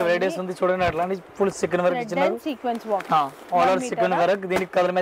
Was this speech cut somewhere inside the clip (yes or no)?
no